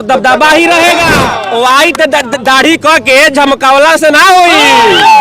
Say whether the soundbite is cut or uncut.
cut